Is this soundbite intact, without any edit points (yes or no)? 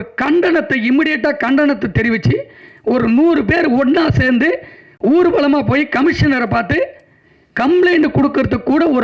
yes